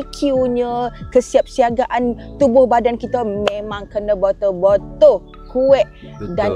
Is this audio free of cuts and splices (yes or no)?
yes